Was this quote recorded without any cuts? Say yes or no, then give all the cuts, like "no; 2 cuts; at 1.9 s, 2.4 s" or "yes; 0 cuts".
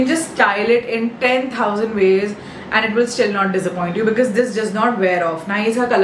yes; 0 cuts